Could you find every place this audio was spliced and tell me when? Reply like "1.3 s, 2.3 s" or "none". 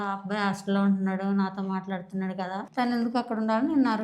2.6 s